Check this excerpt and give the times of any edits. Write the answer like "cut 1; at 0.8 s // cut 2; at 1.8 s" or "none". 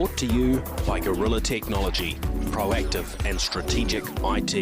none